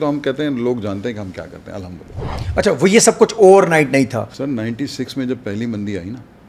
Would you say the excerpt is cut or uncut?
cut